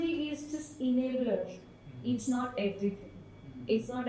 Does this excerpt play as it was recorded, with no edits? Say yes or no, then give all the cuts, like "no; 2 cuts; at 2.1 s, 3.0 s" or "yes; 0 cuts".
yes; 0 cuts